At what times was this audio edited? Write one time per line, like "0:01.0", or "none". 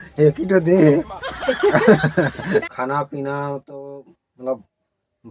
0:02.5